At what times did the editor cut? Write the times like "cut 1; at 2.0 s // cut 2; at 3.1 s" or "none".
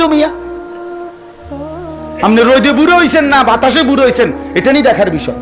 none